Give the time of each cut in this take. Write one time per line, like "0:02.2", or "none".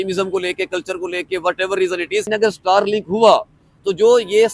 0:02.3